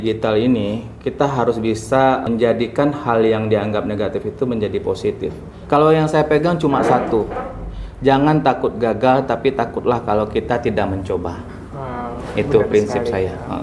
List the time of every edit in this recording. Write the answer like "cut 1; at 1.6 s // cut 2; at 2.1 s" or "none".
cut 1; at 2.2 s // cut 2; at 5.5 s